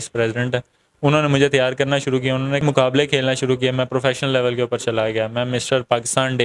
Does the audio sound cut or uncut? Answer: cut